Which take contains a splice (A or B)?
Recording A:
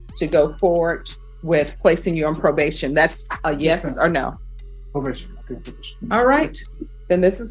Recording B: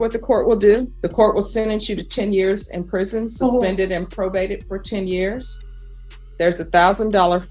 B